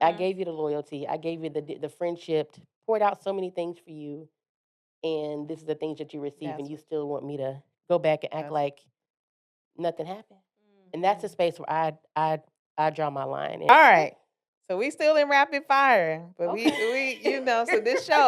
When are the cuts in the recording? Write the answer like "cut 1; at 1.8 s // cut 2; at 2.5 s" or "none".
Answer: cut 1; at 13.7 s